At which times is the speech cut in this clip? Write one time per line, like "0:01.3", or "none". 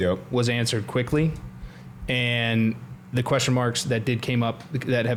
none